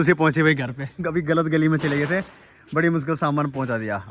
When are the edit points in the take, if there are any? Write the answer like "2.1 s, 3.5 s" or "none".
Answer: 1.0 s